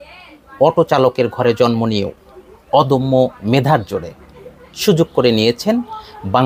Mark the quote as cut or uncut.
uncut